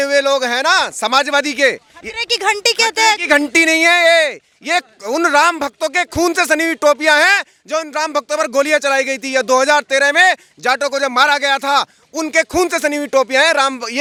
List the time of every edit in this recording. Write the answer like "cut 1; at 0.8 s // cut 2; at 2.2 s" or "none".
none

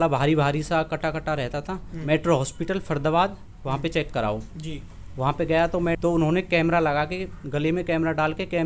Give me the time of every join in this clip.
cut 1; at 2.0 s // cut 2; at 6.0 s

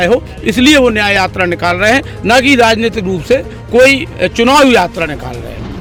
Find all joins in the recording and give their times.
none

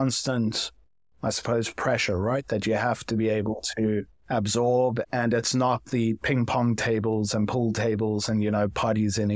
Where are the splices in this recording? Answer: cut 1; at 5.0 s

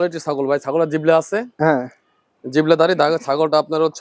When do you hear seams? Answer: none

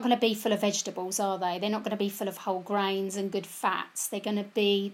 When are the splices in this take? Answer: none

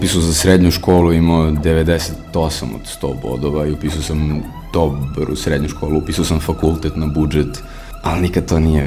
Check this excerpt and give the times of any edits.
none

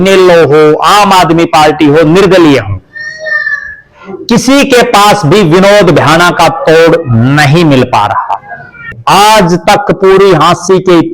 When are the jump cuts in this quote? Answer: cut 1; at 9.0 s

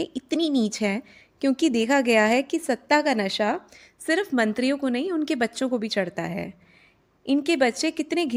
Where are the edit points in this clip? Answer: none

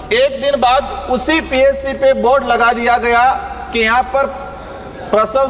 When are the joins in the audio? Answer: none

